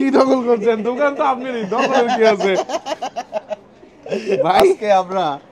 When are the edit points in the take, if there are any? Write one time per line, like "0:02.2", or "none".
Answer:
none